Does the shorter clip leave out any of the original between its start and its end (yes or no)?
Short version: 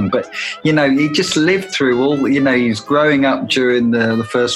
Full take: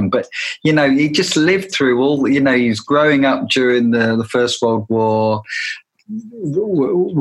no